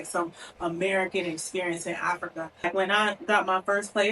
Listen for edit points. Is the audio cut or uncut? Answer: cut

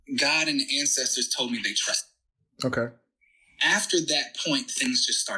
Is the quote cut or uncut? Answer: uncut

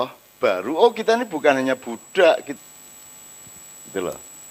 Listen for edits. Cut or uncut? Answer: cut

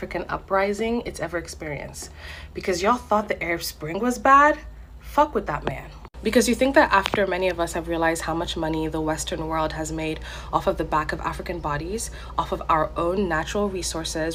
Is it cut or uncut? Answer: uncut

